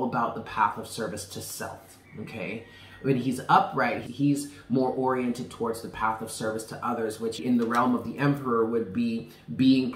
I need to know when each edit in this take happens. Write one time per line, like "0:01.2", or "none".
0:04.0
0:07.4